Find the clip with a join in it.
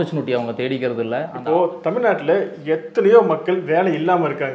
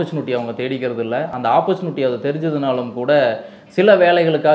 first; 1 cut; at 1.3 s

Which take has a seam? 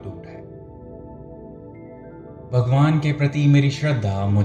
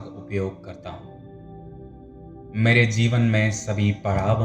second; 2 cuts; at 0.7 s, 2.5 s

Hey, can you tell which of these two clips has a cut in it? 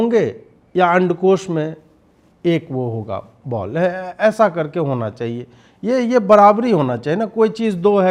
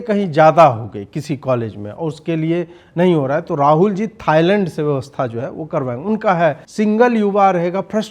second; 1 cut; at 6.6 s

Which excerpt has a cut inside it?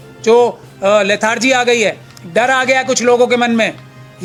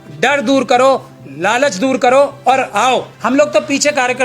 second; 1 cut; at 3.1 s

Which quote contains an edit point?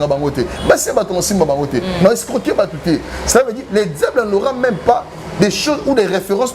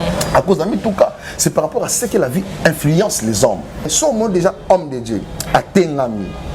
second; 1 cut; at 3.9 s

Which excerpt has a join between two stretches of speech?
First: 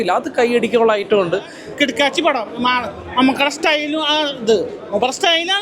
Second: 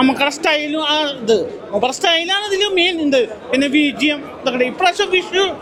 first; 1 cut; at 1.6 s

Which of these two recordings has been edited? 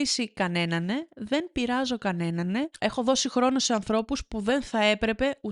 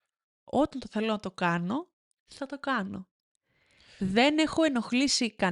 first; 1 cut; at 2.7 s

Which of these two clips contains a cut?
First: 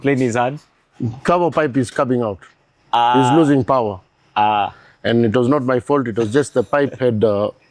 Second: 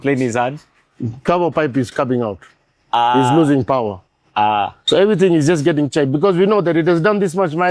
second; 1 cut; at 4.8 s

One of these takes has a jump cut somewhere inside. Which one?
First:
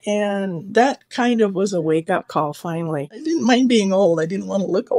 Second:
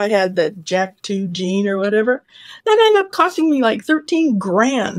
first; 1 cut; at 3.1 s

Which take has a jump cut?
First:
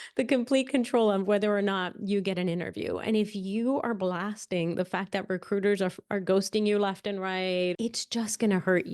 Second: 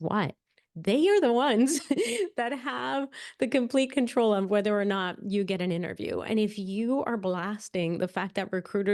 first; 1 cut; at 7.7 s

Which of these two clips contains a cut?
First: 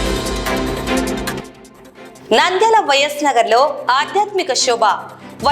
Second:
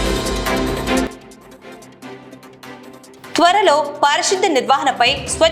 first; 1 cut; at 1.0 s

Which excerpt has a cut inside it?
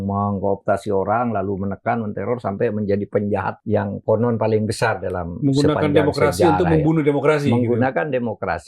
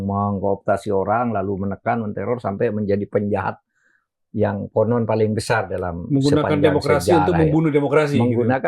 first; 1 cut; at 3.6 s

